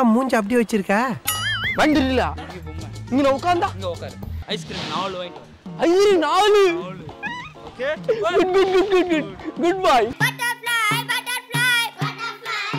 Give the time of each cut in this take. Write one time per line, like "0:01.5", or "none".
0:01.2